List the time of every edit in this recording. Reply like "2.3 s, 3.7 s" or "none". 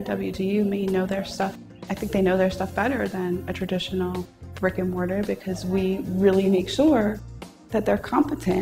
2.4 s